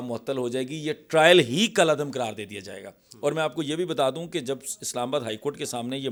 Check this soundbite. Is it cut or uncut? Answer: uncut